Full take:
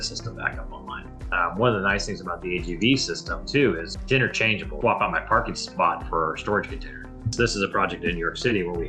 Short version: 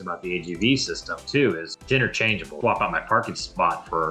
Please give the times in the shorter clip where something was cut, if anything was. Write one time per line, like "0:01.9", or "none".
none